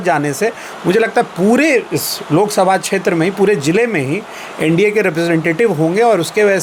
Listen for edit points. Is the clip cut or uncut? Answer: uncut